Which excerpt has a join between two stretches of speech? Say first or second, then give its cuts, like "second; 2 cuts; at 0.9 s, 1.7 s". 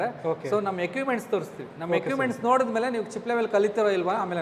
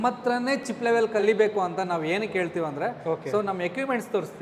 second; 1 cut; at 1.1 s